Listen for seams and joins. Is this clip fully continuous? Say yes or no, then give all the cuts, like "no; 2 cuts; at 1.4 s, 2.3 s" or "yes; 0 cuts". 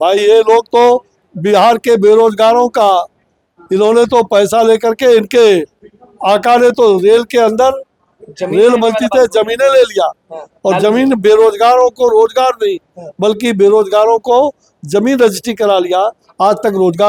yes; 0 cuts